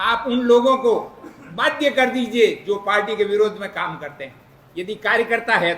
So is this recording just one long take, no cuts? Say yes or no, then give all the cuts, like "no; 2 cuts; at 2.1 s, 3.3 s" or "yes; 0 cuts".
yes; 0 cuts